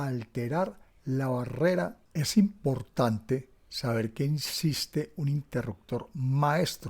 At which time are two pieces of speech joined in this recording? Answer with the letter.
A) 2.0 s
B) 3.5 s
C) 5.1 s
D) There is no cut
A